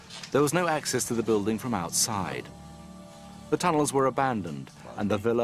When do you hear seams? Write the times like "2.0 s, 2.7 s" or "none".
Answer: 3.9 s